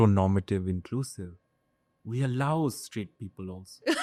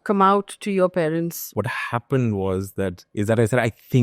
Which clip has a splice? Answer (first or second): second